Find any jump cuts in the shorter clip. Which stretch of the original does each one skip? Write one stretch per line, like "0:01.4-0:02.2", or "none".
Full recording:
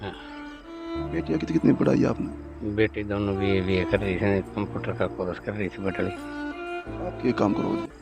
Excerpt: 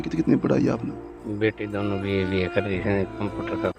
none

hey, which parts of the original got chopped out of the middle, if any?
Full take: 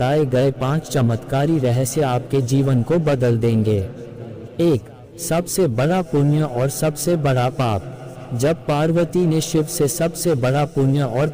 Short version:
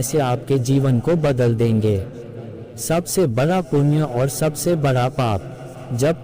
0:04.4-0:05.0

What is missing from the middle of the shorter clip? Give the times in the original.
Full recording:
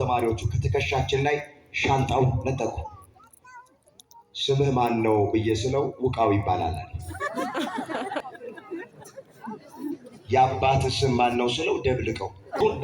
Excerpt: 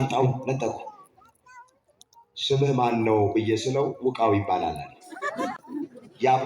0:07.5-0:09.6

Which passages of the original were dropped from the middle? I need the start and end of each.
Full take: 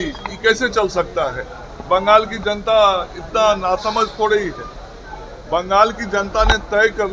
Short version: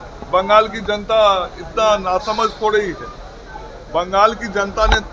none

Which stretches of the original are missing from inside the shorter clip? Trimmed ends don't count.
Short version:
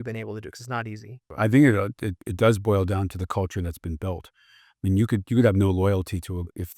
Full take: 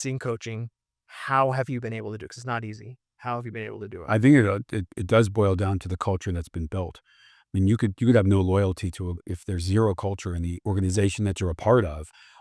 0:03.0-0:04.0

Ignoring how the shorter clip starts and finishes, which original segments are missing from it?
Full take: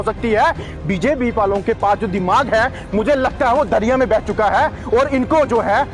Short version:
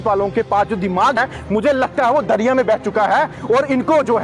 0:02.5-0:02.6

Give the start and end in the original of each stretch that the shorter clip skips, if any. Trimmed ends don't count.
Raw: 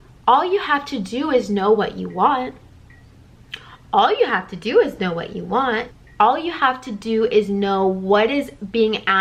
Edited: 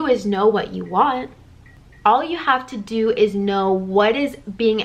0:03.1-0:06.0

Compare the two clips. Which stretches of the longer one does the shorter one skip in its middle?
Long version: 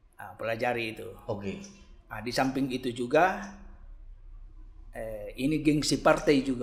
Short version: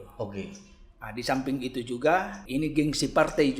0:03.5-0:05.3

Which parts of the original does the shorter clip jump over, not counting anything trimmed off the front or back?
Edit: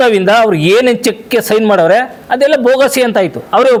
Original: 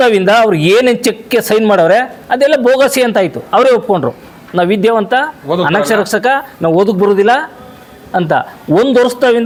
none

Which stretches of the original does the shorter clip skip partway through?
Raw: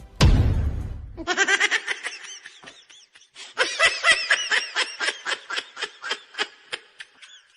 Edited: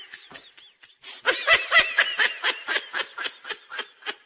none

